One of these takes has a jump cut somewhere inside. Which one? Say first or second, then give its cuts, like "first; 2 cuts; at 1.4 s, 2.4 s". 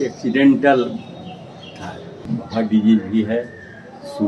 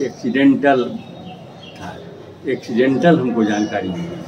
first; 1 cut; at 2.2 s